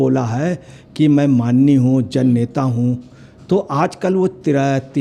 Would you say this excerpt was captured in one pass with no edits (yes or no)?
yes